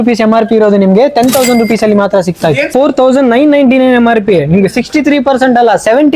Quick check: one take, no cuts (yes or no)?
no